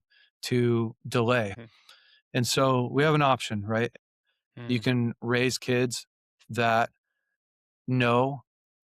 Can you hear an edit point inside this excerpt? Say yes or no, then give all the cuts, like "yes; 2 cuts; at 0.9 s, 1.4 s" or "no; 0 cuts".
yes; 2 cuts; at 1.5 s, 3.9 s